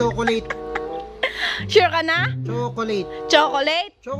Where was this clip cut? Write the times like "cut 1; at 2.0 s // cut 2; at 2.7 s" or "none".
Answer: none